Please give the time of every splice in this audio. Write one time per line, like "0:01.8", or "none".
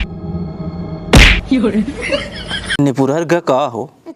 0:02.6